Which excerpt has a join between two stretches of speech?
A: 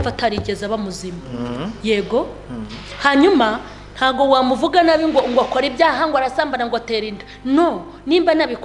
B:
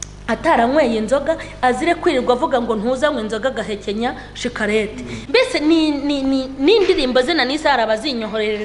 B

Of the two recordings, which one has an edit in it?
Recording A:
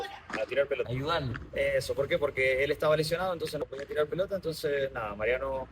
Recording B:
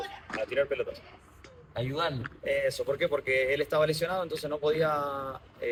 A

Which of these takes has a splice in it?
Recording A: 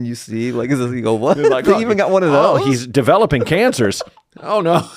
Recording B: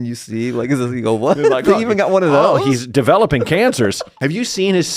B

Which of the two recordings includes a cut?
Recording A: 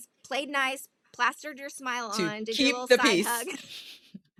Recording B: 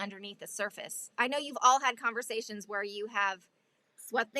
B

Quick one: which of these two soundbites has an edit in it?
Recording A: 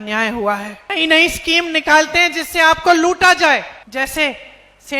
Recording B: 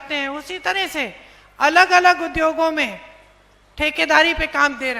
A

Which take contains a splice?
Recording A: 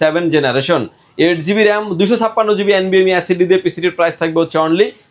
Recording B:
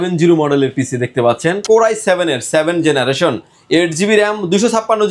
B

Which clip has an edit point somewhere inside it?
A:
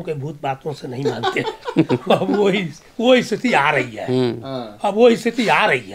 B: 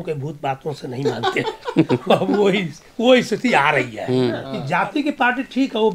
B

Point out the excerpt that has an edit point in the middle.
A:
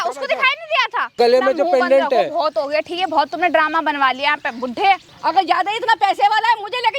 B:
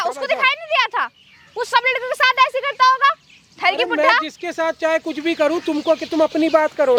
A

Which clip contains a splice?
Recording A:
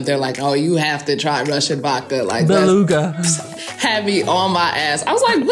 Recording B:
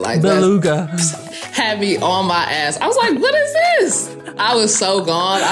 B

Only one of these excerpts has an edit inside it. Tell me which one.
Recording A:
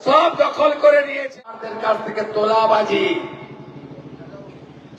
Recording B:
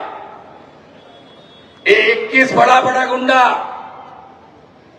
A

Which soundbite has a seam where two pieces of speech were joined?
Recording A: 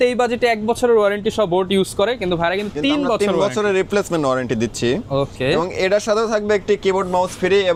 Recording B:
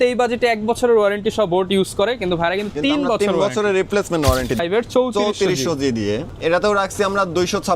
B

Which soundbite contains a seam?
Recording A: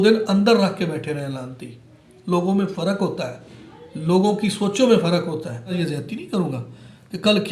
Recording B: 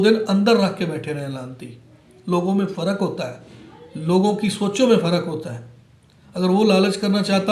A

